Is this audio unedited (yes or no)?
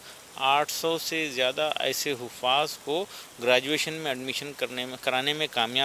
yes